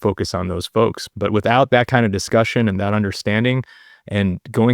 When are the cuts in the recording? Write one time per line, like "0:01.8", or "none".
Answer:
0:01.0